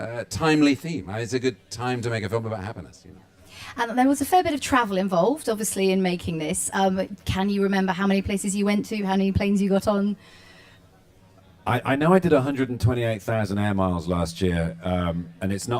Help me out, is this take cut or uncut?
uncut